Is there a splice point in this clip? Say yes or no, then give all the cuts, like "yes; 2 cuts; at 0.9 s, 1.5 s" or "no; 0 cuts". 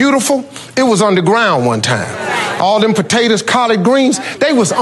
no; 0 cuts